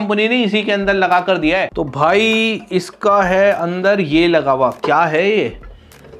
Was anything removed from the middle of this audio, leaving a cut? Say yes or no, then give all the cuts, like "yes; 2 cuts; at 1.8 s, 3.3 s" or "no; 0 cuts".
yes; 1 cut; at 1.7 s